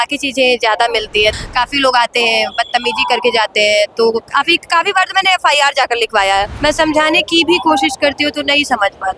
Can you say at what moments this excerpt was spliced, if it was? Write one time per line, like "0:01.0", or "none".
0:01.3
0:06.5